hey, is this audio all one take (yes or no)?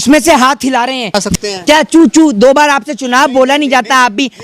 no